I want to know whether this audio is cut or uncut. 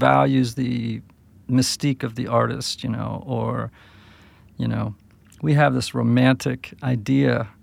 uncut